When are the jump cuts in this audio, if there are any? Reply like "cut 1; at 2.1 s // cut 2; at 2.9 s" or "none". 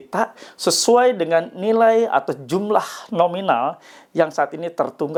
none